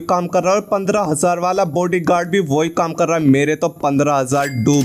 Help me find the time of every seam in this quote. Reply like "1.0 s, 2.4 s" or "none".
none